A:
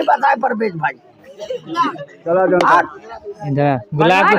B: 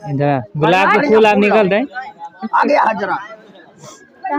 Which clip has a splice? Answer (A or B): A